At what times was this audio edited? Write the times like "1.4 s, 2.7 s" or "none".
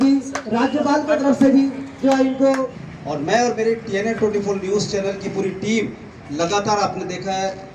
2.7 s